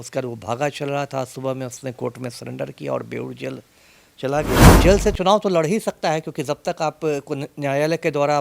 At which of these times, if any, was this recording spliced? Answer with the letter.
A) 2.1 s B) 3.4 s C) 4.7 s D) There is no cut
C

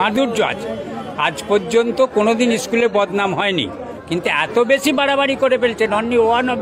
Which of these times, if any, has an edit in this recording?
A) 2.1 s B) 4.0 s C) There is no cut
B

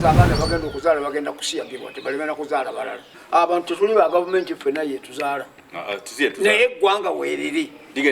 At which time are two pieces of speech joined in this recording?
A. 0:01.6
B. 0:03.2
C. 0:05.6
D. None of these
B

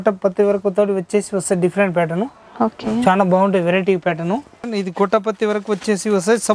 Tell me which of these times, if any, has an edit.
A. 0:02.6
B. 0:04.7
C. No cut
B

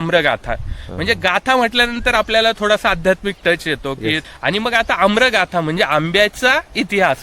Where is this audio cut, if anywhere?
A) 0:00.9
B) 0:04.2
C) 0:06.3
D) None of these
B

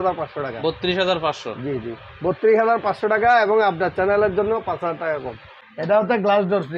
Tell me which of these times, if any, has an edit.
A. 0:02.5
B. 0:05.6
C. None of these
B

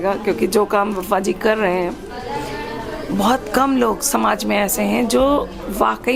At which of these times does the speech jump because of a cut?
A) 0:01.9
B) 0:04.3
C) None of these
C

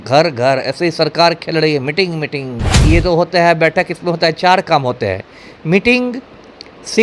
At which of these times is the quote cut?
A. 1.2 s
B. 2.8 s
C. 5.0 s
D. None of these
B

